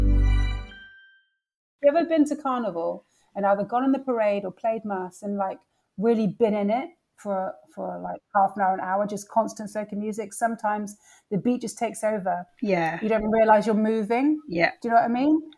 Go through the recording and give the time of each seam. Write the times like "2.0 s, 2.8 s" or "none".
1.7 s